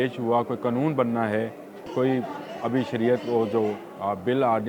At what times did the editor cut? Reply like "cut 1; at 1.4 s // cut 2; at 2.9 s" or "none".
cut 1; at 1.9 s